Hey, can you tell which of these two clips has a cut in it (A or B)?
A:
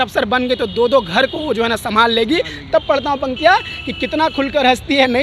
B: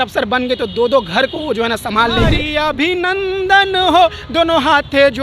B